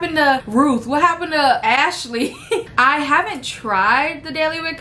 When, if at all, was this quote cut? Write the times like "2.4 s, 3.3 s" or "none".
1.6 s, 2.7 s